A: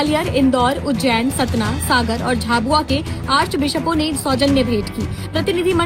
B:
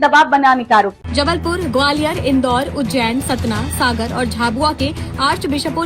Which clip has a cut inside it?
B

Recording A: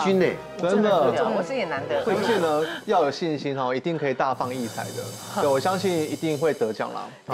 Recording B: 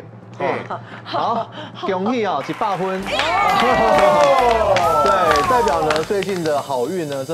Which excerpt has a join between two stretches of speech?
A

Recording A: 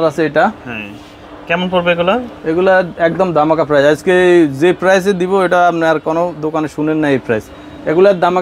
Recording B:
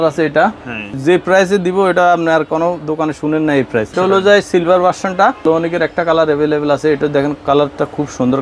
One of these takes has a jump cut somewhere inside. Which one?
B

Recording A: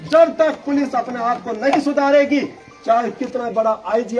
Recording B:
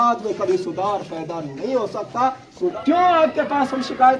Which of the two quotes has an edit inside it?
B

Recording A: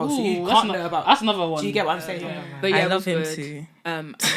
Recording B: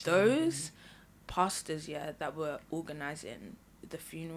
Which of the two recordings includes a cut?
A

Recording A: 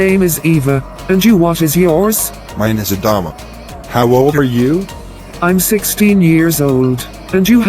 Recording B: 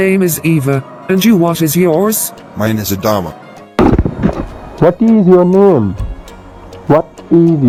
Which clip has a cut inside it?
A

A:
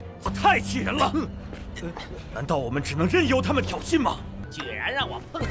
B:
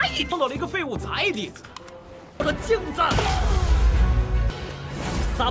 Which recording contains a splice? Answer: A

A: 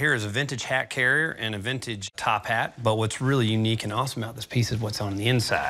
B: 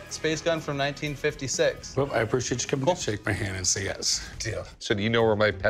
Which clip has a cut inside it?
B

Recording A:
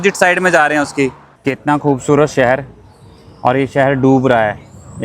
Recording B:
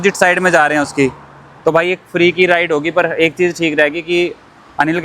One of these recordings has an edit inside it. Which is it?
A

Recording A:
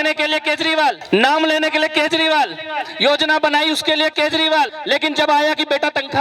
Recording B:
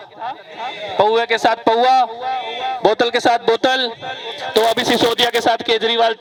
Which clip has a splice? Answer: A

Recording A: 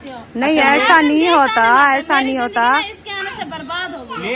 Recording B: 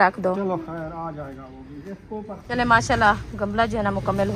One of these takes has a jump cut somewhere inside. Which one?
B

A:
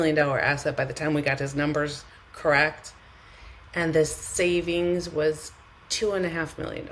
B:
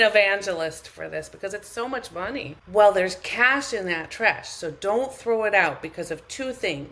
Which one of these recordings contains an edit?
B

